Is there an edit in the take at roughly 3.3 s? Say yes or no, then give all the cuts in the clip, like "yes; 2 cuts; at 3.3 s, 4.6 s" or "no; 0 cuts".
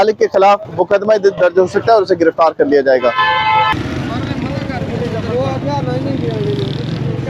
no; 0 cuts